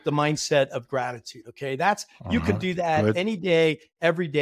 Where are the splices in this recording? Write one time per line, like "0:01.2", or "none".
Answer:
none

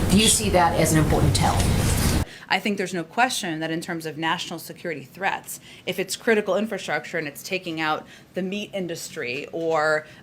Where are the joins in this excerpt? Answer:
0:02.2

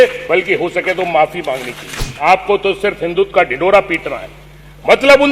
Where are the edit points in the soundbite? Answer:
0:02.0

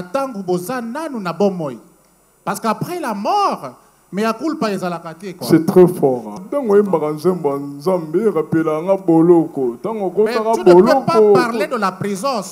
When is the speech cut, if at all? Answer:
0:06.4

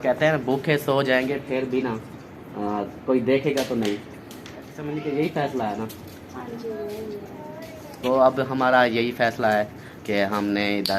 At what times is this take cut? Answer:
0:04.8

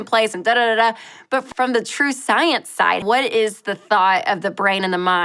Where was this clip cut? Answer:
0:01.4
0:03.0

